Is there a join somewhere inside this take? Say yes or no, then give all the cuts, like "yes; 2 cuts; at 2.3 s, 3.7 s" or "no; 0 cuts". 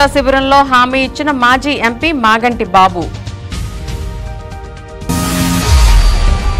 yes; 1 cut; at 5.0 s